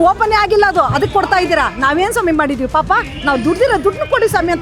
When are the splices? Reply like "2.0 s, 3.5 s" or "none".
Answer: none